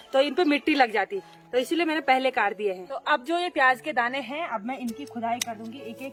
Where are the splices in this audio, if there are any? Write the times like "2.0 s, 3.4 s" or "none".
none